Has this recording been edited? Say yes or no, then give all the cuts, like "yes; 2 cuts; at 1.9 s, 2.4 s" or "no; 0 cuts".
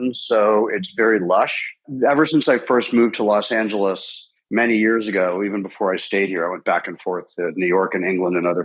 no; 0 cuts